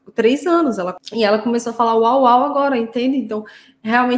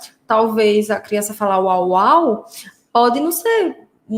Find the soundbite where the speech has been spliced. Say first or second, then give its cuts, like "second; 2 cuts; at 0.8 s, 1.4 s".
first; 1 cut; at 1.0 s